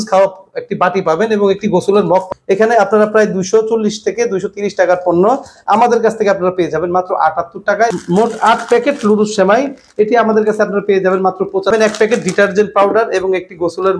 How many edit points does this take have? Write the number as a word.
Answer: three